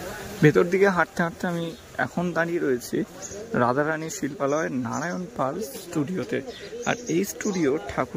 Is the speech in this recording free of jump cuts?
yes; 0 cuts

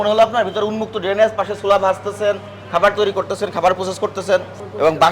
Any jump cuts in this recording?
no; 0 cuts

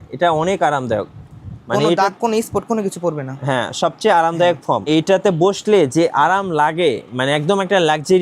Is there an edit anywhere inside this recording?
yes; 1 cut; at 4.9 s

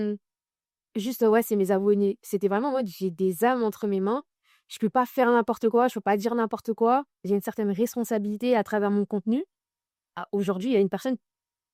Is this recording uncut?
yes; 0 cuts

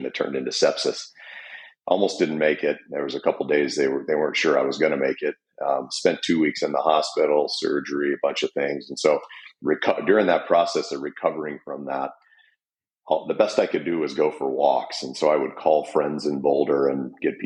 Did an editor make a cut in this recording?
no; 0 cuts

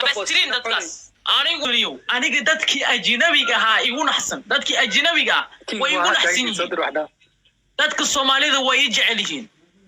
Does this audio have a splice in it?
yes; 1 cut; at 1.6 s

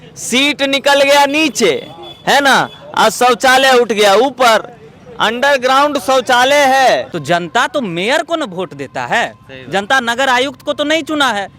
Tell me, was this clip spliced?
yes; 1 cut; at 7.1 s

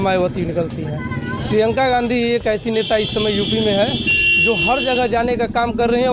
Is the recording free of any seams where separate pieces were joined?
yes; 0 cuts

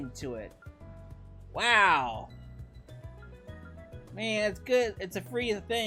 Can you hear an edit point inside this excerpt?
no; 0 cuts

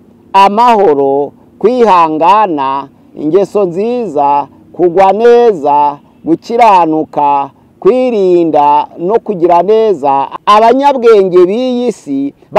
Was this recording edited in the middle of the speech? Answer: yes; 1 cut; at 10.3 s

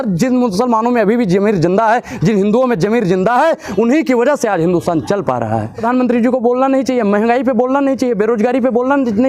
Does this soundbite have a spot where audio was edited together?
yes; 1 cut; at 5.8 s

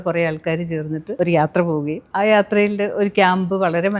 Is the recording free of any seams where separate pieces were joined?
no; 2 cuts; at 1.1 s, 2.0 s

